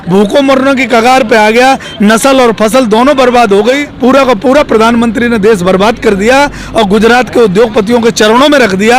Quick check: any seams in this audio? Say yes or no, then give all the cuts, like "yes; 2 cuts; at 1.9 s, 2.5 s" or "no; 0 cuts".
yes; 1 cut; at 3.9 s